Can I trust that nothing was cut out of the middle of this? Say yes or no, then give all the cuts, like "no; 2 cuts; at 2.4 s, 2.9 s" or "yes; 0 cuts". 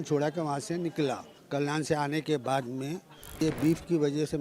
no; 2 cuts; at 1.3 s, 3.4 s